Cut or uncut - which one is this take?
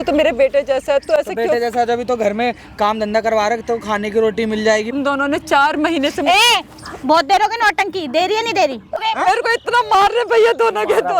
cut